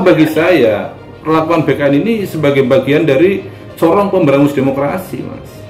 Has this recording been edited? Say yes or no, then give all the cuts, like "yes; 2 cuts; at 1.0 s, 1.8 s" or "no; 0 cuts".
no; 0 cuts